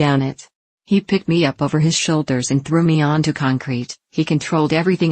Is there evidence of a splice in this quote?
yes; 1 cut; at 4.0 s

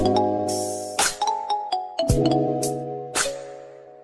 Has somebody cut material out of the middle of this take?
no; 0 cuts

